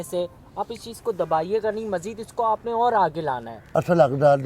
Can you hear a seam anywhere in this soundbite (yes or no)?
yes